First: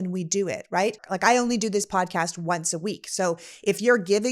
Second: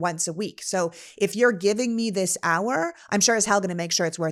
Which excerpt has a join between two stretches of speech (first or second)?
first